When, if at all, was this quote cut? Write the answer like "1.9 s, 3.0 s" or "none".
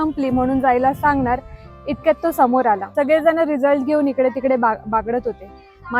2.9 s

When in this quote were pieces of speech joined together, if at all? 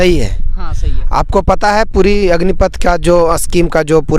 none

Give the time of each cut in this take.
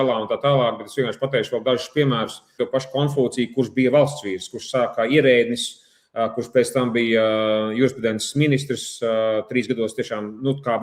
2.5 s

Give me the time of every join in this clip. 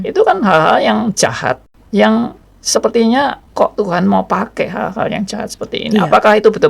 1.7 s

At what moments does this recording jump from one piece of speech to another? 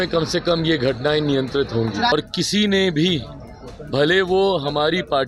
2.1 s

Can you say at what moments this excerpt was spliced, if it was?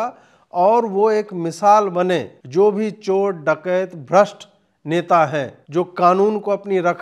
2.4 s, 5.6 s

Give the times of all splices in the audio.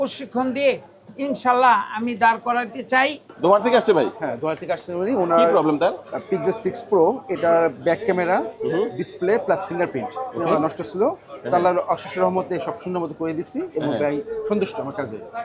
3.3 s

